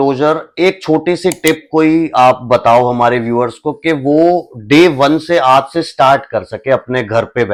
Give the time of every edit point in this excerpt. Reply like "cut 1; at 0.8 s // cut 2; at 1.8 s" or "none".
none